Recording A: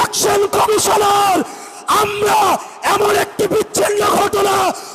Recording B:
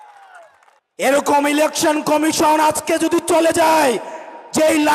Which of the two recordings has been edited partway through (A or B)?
B